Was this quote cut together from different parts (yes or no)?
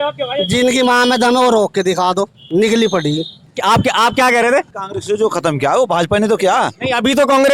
no